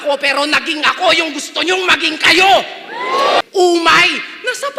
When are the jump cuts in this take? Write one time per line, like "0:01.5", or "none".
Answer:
0:03.4